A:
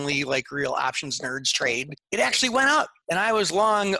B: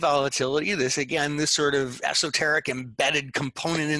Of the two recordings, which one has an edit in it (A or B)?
A